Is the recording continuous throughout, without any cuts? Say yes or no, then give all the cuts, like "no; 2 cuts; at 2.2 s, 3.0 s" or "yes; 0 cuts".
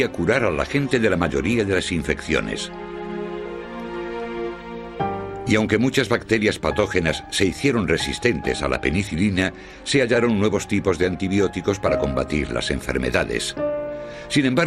yes; 0 cuts